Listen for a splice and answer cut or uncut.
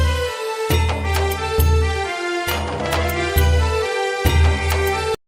uncut